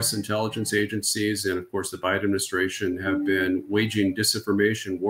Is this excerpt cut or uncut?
uncut